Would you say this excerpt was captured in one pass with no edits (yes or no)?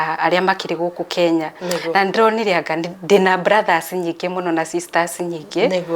yes